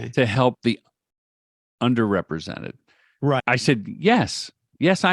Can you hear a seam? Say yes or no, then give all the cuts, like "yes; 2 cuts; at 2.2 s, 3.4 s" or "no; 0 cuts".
yes; 1 cut; at 3.6 s